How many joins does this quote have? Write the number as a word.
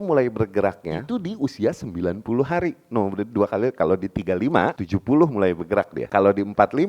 three